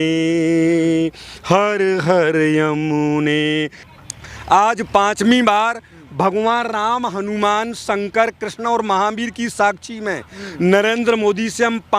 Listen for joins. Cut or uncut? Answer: cut